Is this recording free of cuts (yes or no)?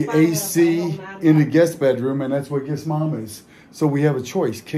yes